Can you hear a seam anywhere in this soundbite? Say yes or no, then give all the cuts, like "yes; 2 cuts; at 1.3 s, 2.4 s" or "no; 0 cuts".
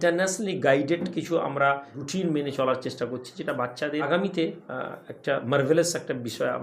yes; 2 cuts; at 2.0 s, 4.1 s